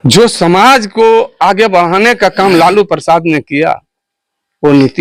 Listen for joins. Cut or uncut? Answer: uncut